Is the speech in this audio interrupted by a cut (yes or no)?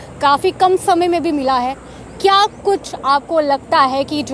no